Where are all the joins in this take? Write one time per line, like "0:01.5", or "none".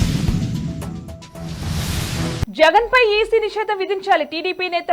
0:02.4